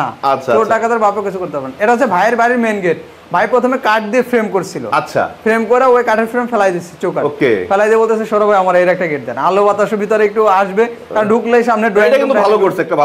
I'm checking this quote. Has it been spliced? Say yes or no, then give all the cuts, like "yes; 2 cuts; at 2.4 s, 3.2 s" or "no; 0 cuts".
no; 0 cuts